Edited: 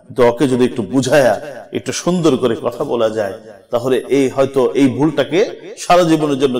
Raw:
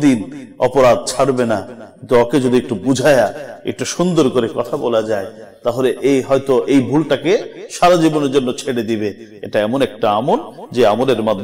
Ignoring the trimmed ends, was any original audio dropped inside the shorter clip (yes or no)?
no